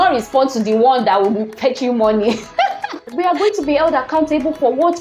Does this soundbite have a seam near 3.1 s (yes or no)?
yes